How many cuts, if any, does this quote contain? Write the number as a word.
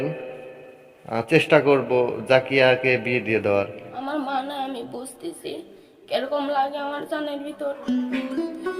one